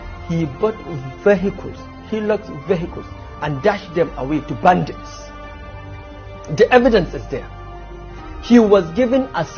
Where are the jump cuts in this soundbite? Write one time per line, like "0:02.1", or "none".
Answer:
none